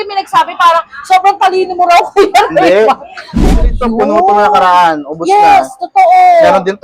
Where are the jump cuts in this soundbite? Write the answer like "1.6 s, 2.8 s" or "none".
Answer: 3.3 s